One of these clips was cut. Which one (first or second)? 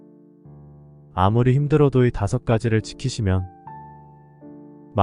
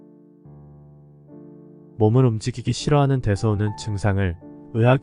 first